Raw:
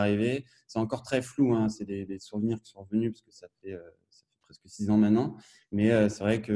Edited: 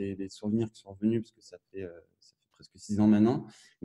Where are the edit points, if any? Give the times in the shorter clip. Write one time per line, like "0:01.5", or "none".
none